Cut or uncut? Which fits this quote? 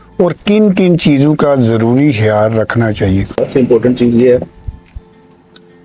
uncut